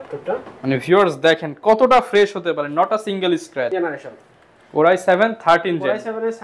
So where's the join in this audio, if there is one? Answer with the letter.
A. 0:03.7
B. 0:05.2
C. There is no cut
A